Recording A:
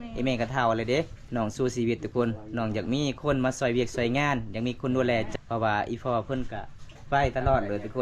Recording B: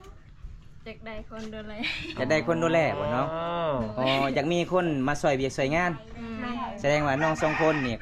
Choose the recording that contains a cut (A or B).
A